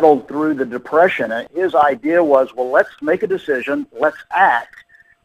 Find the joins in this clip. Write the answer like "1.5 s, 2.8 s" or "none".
1.4 s, 3.0 s